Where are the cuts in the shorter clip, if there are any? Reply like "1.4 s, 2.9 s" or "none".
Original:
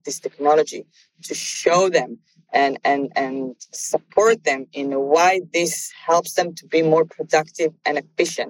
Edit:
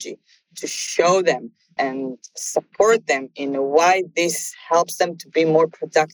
1.7 s

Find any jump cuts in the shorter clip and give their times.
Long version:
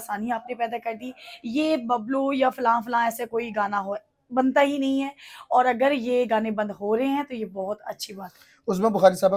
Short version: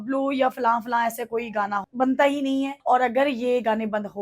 1.9 s, 2.8 s

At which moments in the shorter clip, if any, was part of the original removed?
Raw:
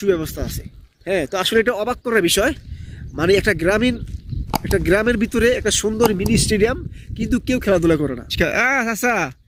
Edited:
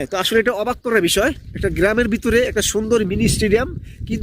1.5 s

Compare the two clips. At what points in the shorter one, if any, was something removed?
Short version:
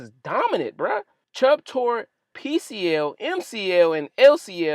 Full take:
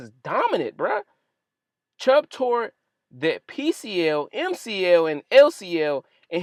1.2 s, 2.3 s

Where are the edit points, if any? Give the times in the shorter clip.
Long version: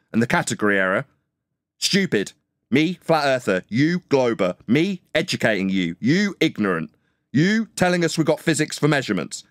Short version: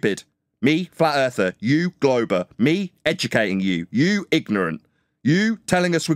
none

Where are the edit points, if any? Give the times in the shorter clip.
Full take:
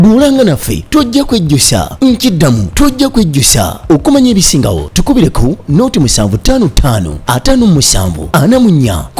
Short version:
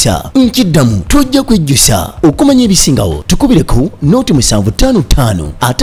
none

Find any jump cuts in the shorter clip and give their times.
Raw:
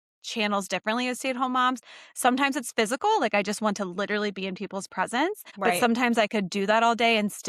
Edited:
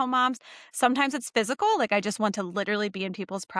none

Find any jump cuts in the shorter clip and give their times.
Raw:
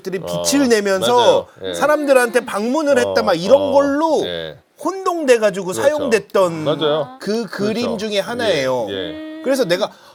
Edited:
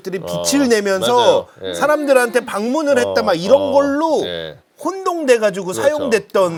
none

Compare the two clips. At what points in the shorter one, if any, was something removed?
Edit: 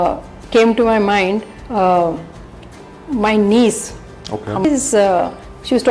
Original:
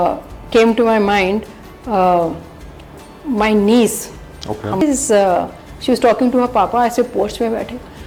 1.6 s

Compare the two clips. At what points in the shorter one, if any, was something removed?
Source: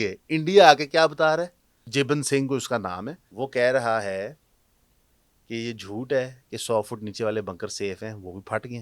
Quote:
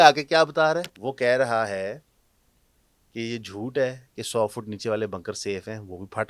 1.0 s

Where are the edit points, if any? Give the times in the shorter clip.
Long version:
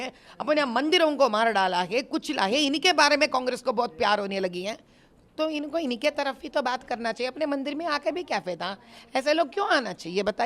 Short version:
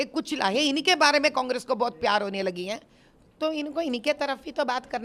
none

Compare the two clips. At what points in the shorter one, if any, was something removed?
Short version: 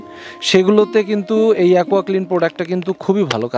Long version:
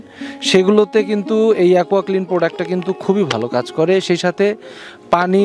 none

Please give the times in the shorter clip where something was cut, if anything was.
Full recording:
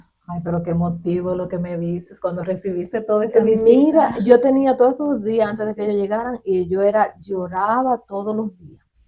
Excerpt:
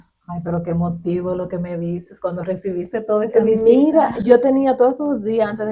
none

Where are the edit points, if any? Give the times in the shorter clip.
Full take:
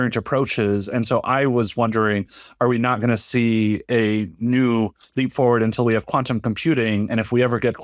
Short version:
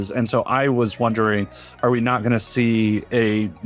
none

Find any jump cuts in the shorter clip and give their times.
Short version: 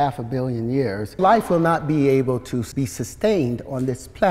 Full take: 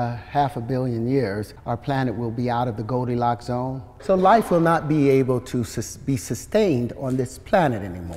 1.2 s, 2.7 s

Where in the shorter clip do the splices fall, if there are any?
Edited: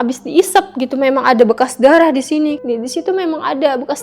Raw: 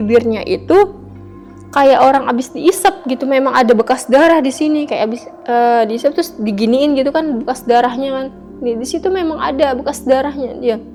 2.6 s

